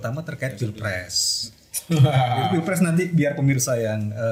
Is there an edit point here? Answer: no; 0 cuts

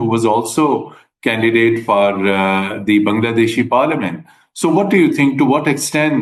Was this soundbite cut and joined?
no; 0 cuts

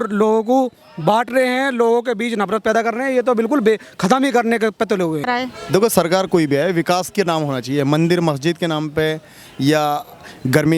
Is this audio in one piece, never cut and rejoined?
no; 1 cut; at 5.3 s

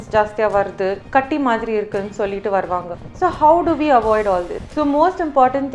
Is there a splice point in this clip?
yes; 3 cuts; at 1.0 s, 3.0 s, 4.6 s

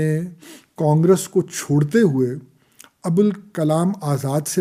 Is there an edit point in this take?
no; 0 cuts

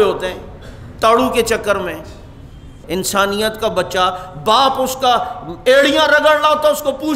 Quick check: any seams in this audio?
yes; 1 cut; at 2.8 s

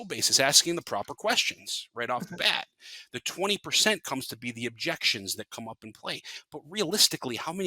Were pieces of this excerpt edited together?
no; 0 cuts

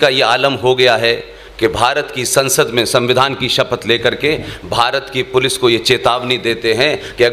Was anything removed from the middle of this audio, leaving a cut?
no; 0 cuts

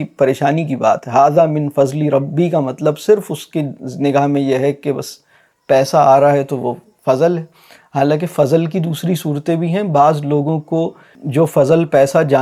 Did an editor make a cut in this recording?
no; 0 cuts

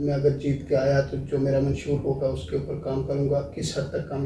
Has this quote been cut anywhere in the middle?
no; 0 cuts

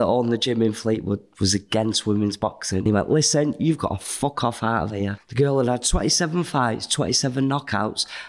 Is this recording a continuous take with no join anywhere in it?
no; 2 cuts; at 2.9 s, 5.2 s

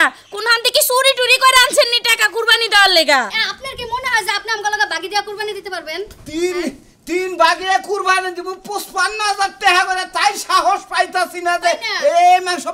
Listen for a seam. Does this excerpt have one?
yes; 1 cut; at 3.3 s

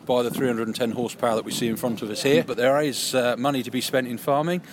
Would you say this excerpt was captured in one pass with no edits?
no; 1 cut; at 2.5 s

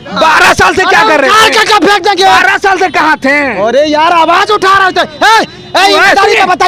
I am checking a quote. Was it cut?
no; 0 cuts

